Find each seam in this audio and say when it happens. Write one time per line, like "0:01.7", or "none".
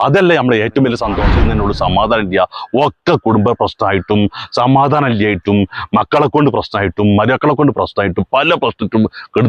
0:01.4